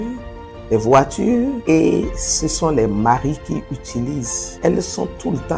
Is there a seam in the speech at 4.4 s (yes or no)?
yes